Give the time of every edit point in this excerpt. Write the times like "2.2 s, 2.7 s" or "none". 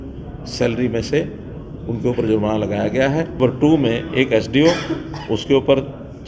3.4 s

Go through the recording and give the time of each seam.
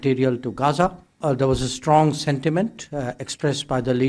1.2 s

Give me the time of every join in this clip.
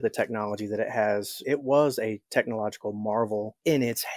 1.3 s

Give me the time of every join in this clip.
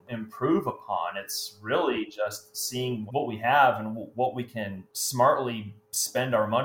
none

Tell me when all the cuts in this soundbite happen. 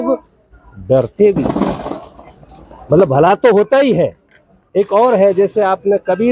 none

